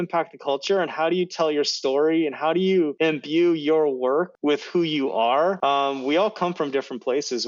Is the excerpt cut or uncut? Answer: cut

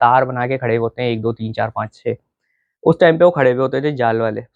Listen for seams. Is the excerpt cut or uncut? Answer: uncut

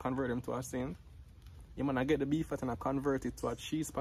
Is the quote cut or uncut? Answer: uncut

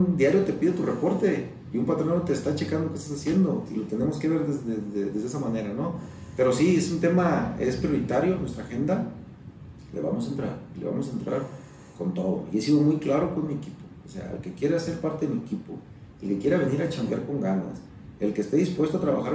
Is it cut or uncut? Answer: uncut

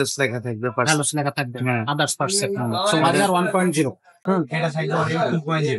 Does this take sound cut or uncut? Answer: cut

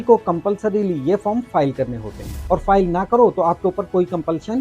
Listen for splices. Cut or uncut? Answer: cut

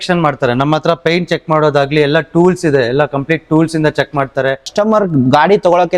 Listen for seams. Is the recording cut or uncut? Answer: cut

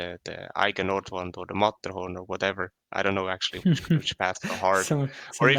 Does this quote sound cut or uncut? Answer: uncut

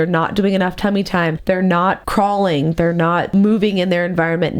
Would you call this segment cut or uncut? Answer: cut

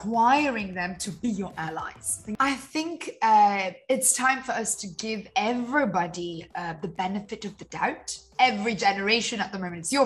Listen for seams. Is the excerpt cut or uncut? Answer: cut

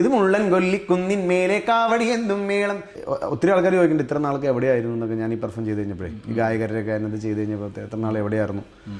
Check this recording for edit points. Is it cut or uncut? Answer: cut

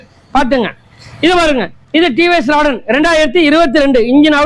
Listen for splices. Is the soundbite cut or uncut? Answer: uncut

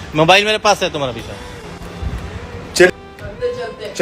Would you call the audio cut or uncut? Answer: cut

